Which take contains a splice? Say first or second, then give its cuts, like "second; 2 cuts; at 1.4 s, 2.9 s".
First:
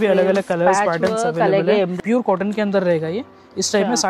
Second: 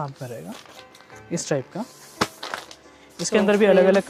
first; 1 cut; at 1.9 s